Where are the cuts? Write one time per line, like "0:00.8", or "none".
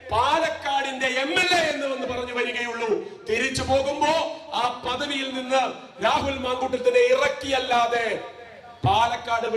none